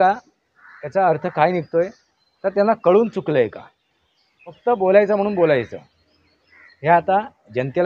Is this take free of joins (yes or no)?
no